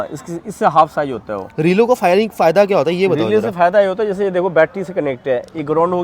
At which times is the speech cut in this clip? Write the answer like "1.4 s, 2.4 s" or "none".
none